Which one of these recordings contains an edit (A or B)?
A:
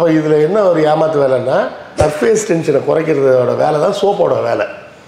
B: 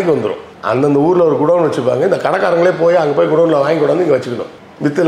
A